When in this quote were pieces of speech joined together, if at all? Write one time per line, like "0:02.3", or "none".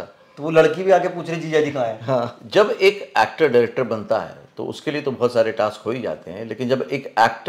0:02.4